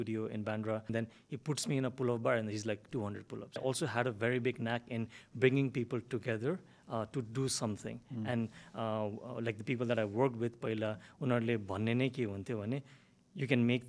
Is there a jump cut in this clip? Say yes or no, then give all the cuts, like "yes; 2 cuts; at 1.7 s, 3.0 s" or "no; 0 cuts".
yes; 2 cuts; at 0.9 s, 3.6 s